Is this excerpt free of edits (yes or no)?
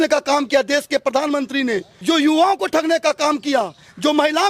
no